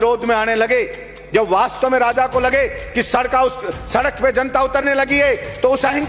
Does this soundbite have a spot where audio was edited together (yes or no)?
no